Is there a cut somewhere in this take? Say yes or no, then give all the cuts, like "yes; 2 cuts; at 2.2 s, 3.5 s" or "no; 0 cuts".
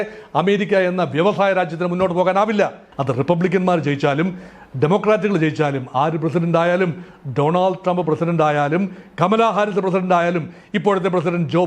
yes; 1 cut; at 2.9 s